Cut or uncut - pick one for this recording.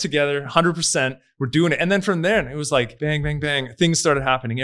cut